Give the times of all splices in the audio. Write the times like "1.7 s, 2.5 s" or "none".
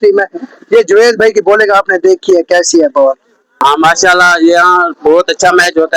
3.5 s